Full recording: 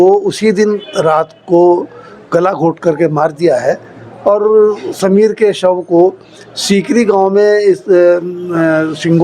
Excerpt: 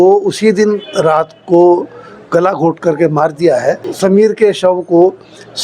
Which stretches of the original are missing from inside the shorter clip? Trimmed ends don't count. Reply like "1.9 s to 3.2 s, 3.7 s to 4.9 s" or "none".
3.9 s to 4.9 s